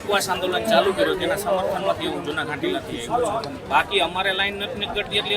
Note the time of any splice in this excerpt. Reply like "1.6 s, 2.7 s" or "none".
3.6 s